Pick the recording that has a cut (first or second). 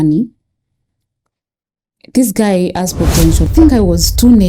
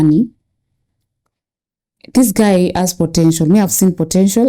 first